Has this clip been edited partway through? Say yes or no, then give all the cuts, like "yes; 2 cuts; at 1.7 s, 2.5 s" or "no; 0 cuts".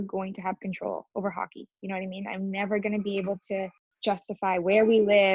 no; 0 cuts